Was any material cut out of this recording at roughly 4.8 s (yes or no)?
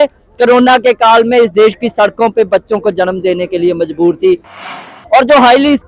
yes